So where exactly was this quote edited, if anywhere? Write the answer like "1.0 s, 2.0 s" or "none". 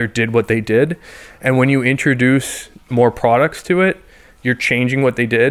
none